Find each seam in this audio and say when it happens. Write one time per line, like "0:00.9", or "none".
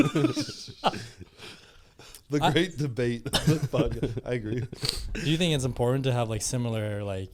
none